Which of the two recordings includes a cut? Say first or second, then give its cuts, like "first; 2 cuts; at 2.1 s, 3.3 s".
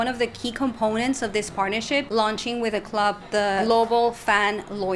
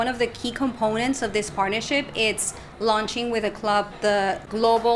first; 2 cuts; at 2.1 s, 3.6 s